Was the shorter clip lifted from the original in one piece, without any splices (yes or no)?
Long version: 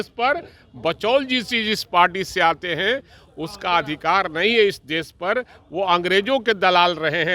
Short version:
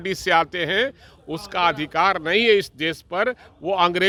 yes